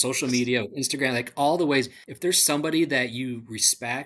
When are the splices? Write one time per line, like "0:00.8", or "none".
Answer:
0:02.0